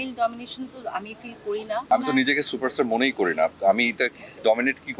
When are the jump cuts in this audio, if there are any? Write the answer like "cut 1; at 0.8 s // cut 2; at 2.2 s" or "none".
cut 1; at 1.9 s